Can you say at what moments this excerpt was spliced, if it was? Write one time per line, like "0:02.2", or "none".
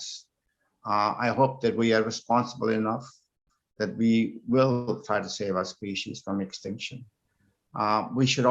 none